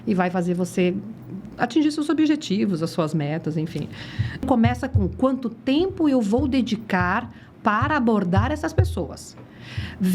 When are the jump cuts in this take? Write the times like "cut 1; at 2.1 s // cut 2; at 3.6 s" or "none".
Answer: cut 1; at 4.4 s